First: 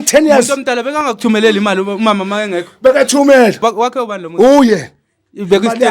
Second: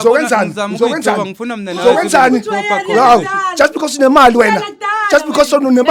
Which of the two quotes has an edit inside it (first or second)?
first